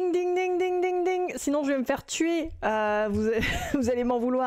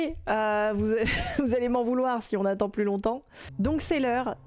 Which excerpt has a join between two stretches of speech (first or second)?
second